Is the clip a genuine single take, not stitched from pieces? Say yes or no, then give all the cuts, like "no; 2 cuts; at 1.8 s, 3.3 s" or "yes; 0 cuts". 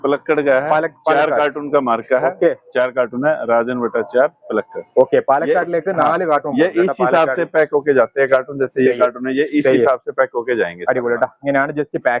yes; 0 cuts